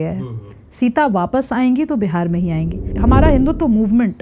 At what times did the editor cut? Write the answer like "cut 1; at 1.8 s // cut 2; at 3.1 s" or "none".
cut 1; at 2.9 s